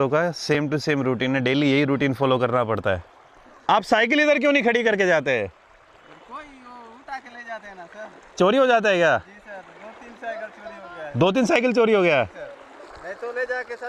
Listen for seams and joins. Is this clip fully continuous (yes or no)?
yes